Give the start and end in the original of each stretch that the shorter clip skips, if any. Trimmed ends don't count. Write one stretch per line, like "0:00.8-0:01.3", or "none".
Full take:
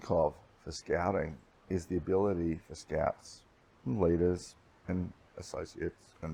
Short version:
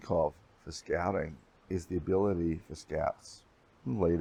none